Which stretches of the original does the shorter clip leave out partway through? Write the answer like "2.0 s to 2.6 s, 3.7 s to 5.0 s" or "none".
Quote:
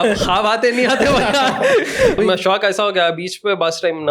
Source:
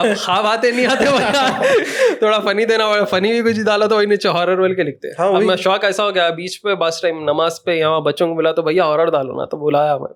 2.2 s to 5.4 s